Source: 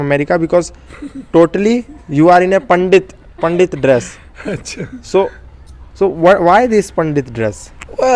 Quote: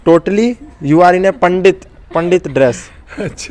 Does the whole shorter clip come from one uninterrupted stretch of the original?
yes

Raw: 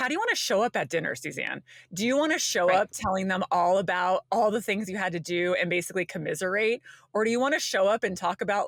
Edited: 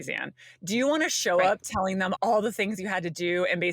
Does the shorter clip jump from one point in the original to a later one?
yes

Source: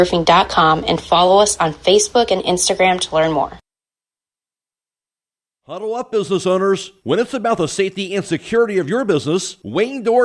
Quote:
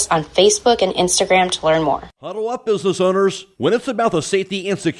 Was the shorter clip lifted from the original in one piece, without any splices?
no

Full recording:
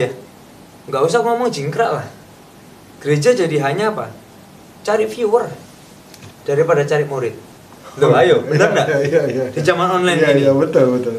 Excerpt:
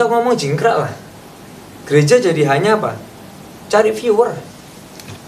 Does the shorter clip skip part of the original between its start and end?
no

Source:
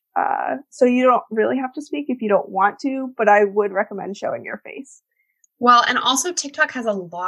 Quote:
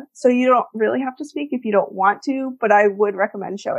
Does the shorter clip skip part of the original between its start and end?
no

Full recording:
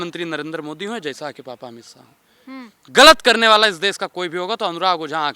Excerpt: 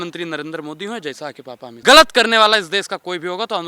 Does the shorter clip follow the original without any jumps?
no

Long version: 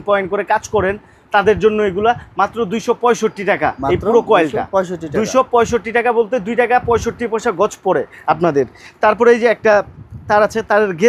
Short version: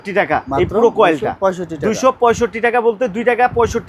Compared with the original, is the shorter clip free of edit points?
yes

